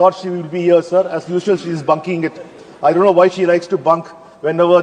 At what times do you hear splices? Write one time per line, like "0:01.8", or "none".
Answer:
none